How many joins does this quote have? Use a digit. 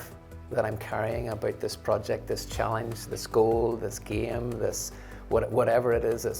0